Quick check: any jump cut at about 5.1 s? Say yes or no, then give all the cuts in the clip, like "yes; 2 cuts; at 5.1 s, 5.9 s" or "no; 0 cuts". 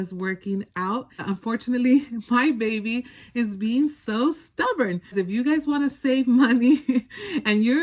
yes; 2 cuts; at 1.2 s, 5.1 s